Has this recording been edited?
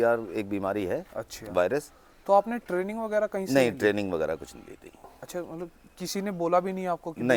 no; 0 cuts

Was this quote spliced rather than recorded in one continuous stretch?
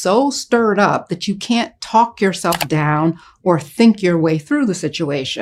no; 0 cuts

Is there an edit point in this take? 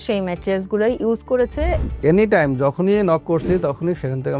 yes; 1 cut; at 1.8 s

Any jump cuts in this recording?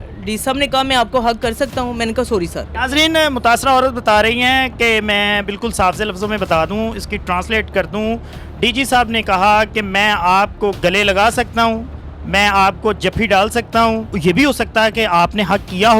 yes; 2 cuts; at 2.7 s, 14.1 s

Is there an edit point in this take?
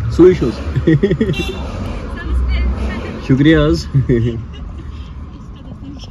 no; 0 cuts

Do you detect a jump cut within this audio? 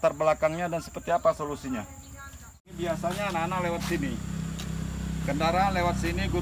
yes; 1 cut; at 2.7 s

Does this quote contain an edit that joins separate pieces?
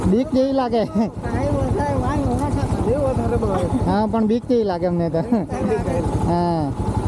no; 0 cuts

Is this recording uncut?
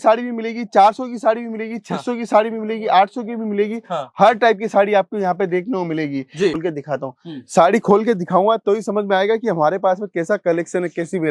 no; 1 cut; at 6.6 s

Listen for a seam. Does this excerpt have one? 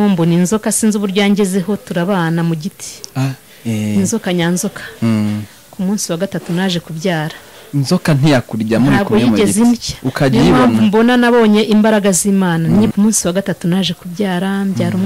yes; 1 cut; at 12.9 s

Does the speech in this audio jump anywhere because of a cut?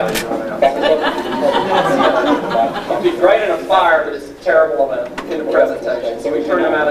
yes; 1 cut; at 3.8 s

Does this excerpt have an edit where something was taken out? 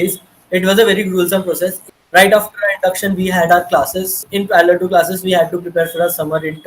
yes; 2 cuts; at 1.8 s, 4.2 s

